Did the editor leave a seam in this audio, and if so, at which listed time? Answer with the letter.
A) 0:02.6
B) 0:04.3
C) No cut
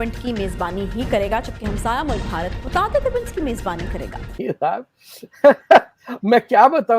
B